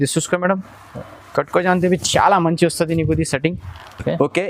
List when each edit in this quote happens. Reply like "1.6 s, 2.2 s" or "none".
none